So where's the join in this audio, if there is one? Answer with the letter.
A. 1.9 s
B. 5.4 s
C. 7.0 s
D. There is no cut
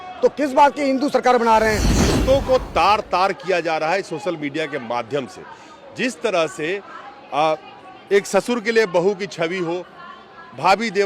A